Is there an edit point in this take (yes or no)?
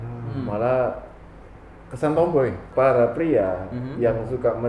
yes